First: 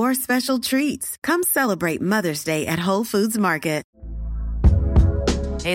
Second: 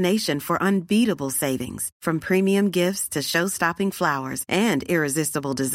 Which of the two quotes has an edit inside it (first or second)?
first